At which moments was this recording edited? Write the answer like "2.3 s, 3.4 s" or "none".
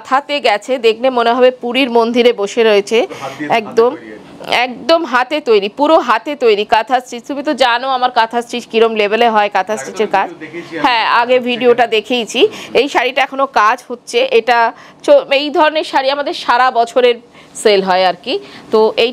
none